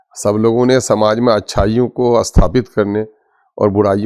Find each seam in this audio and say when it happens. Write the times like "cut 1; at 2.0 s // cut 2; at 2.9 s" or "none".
none